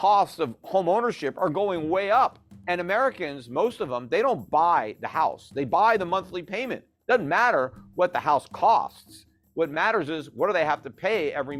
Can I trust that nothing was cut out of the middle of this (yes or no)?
no